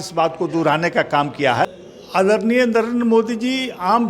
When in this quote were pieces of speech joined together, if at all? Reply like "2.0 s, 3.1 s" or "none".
1.7 s